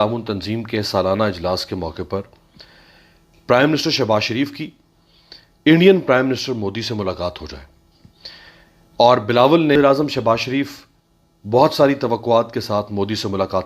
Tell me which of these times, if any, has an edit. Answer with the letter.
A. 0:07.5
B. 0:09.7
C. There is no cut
B